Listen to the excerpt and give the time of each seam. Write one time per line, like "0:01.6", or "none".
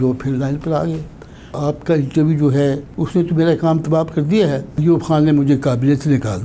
0:01.6
0:02.9
0:04.8